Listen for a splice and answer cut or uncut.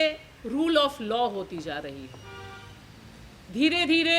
uncut